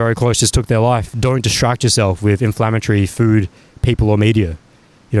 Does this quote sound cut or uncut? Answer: cut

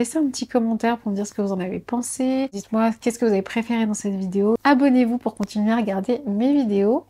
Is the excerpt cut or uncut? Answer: cut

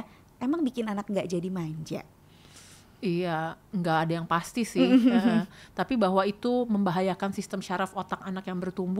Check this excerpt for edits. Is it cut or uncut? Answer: uncut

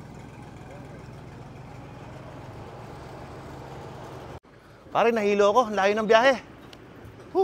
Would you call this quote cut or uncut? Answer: cut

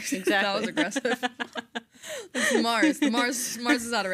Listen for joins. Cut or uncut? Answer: uncut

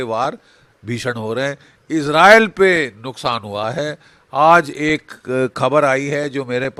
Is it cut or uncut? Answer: uncut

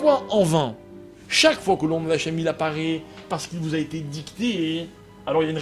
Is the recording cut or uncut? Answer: cut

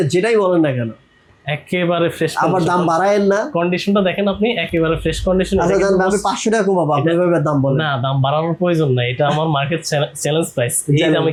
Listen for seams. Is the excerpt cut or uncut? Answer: uncut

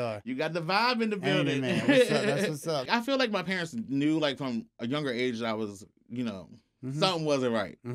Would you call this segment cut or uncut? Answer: cut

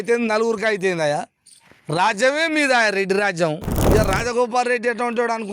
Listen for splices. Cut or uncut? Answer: cut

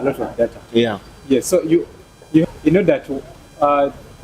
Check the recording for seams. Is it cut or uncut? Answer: cut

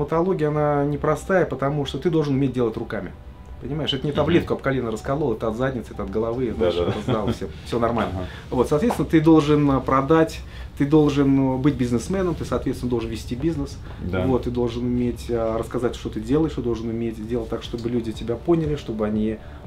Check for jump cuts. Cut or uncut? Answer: uncut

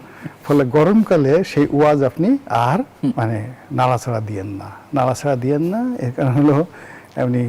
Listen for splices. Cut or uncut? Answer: cut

